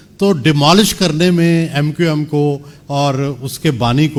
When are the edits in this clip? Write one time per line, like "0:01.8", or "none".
none